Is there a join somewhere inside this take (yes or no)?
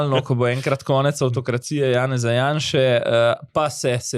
no